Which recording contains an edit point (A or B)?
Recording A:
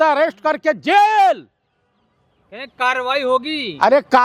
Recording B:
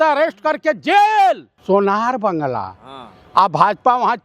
B